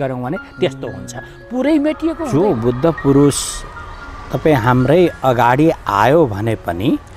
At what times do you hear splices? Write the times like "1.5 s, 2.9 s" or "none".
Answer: 2.2 s